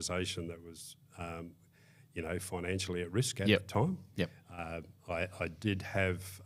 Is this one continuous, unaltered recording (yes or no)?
yes